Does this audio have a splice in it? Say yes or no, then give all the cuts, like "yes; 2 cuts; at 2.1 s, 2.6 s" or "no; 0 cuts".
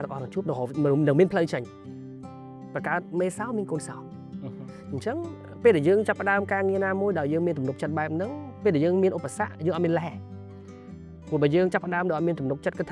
no; 0 cuts